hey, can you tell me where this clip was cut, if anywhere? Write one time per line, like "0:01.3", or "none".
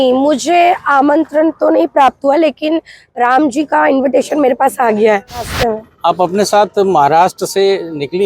0:05.5